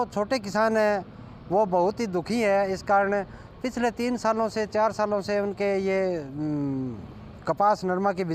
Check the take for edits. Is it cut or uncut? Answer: uncut